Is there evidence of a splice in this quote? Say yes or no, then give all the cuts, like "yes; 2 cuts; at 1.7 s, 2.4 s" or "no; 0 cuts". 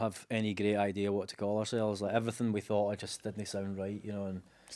no; 0 cuts